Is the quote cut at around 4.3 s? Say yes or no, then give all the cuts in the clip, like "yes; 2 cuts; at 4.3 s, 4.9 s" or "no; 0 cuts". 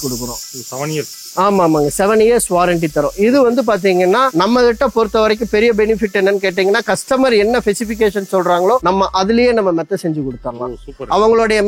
yes; 2 cuts; at 4.3 s, 8.8 s